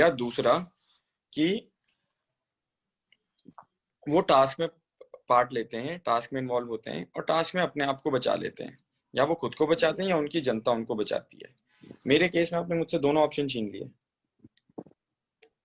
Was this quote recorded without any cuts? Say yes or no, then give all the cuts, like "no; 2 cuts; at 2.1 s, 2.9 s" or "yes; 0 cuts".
yes; 0 cuts